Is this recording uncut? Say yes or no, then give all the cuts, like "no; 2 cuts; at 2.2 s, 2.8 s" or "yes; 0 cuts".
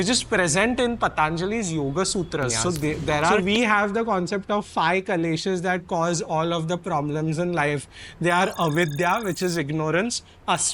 no; 1 cut; at 3.3 s